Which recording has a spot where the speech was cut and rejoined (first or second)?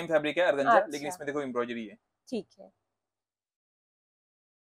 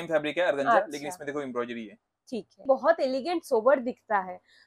second